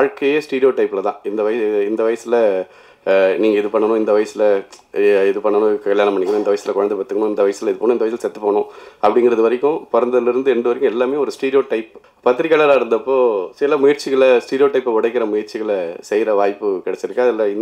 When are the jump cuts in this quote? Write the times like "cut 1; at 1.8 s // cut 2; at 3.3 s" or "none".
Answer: cut 1; at 12.0 s